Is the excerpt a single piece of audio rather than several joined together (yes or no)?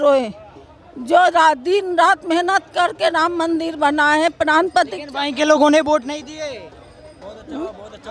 yes